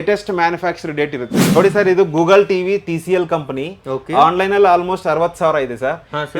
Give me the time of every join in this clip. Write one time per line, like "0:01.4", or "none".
0:01.4